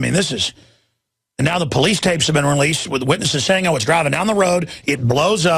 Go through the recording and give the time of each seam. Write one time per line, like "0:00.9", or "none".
0:03.6